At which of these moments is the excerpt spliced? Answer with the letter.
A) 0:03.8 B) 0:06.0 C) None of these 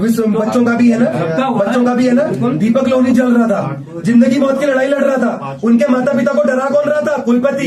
C